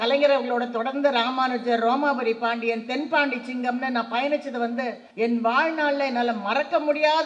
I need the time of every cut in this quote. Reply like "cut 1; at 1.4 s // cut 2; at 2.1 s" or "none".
cut 1; at 5.0 s